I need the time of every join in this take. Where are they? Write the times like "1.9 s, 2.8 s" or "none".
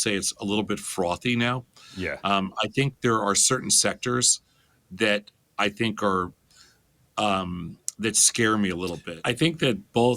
9.1 s